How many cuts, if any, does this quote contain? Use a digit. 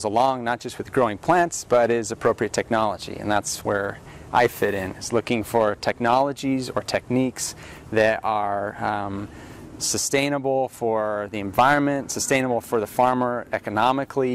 0